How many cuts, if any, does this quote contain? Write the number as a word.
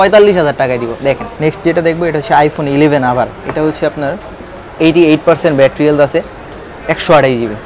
one